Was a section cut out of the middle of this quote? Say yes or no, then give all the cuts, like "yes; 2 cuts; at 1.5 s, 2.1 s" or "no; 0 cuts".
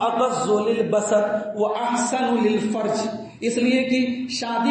no; 0 cuts